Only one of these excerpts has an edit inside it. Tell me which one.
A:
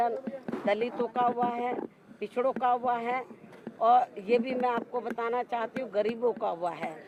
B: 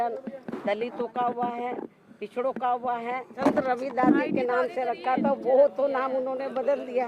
B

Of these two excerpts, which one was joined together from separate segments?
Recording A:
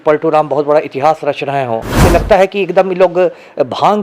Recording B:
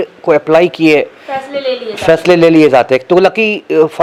A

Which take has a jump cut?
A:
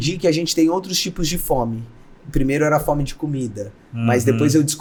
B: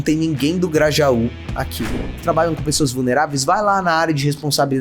B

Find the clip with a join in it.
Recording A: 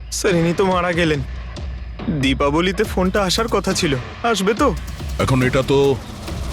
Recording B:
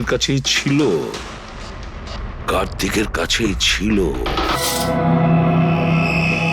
B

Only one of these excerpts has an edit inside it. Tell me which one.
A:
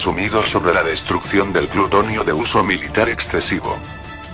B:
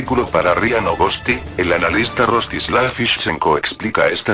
A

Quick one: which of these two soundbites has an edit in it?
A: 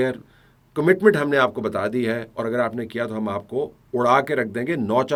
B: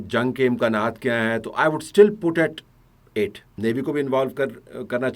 B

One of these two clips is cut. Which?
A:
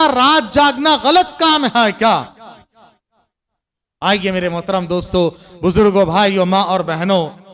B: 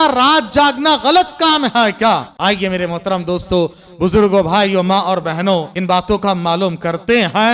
B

